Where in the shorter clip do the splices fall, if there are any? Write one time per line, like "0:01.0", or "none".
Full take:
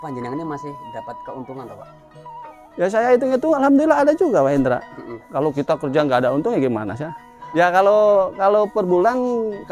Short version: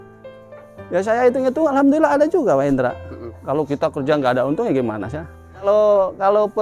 0:05.7